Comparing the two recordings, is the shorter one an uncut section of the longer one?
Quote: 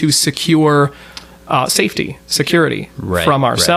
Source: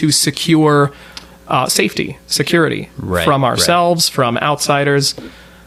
yes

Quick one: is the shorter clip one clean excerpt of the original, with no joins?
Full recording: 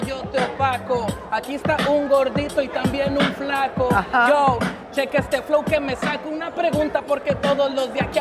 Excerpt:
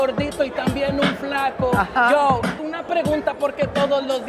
no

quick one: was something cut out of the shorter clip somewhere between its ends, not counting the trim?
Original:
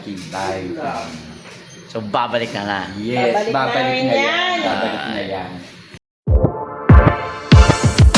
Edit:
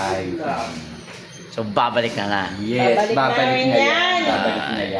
no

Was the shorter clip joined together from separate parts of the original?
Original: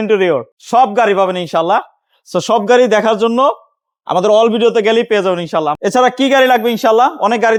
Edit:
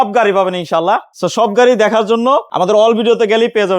yes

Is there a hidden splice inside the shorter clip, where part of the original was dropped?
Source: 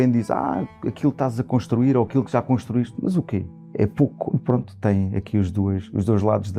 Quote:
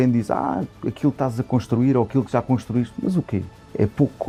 no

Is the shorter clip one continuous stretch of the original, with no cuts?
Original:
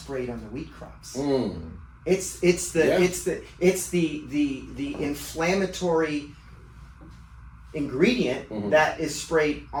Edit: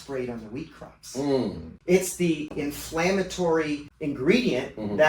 no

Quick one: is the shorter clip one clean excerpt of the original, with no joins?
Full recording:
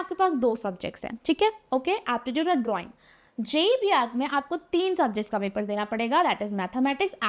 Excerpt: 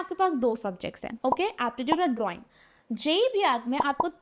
no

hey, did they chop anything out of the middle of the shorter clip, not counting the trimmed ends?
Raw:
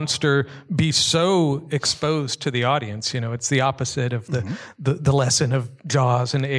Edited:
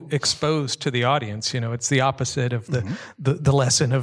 no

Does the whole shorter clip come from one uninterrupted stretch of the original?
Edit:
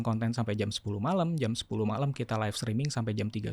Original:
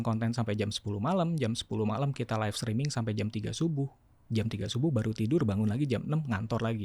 yes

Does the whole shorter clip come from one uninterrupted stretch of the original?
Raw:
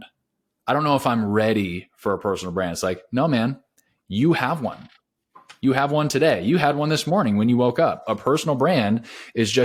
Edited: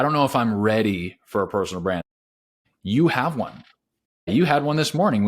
no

